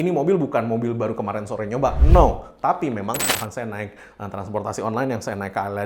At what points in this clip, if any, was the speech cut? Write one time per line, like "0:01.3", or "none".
0:03.3